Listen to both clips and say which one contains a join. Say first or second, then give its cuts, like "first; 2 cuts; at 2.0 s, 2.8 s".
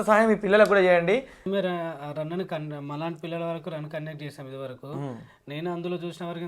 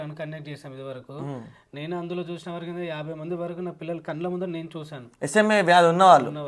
first; 1 cut; at 1.4 s